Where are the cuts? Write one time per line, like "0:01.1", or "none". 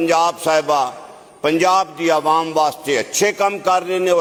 none